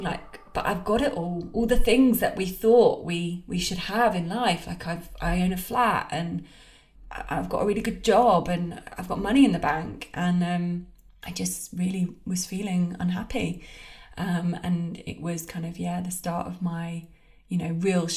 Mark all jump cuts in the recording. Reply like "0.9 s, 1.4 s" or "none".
none

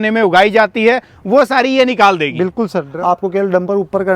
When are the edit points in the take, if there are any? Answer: 2.8 s

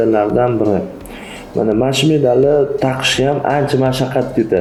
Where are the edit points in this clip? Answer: none

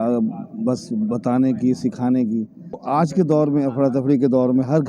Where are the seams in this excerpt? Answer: 2.8 s

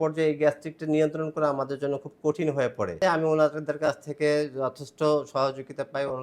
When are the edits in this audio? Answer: 3.0 s

